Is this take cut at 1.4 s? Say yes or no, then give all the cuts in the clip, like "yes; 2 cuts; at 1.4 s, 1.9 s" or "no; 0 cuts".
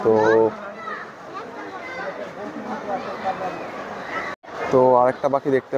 no; 1 cut; at 4.4 s